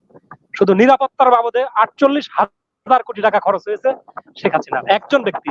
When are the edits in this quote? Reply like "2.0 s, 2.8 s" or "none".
none